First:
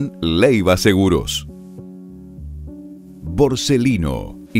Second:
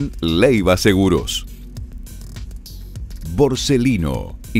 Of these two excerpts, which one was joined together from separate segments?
first; 2 cuts; at 1.5 s, 3.2 s

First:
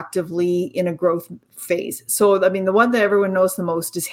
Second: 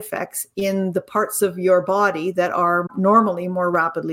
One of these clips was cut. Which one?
second; 1 cut; at 2.9 s

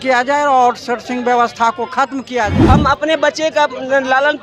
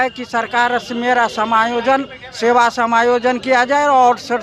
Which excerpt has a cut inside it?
first; 1 cut; at 2.6 s

